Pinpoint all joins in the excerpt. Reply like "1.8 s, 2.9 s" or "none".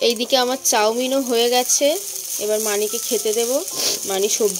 none